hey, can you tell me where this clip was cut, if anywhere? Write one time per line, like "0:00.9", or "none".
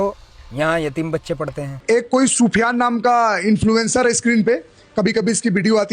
0:01.7